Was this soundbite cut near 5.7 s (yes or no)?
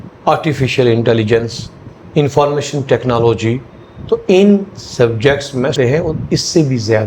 yes